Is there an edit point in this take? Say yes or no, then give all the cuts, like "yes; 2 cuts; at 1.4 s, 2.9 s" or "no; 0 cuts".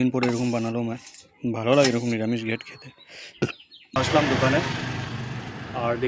yes; 1 cut; at 4.0 s